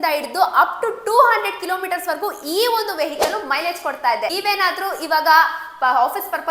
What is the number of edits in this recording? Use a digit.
1